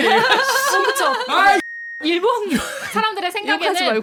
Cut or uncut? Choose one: uncut